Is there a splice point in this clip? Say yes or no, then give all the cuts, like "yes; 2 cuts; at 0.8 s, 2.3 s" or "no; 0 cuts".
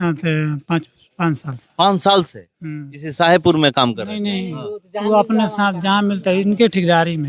no; 0 cuts